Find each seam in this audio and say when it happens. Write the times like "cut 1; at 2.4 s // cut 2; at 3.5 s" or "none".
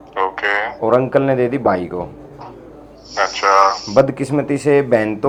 none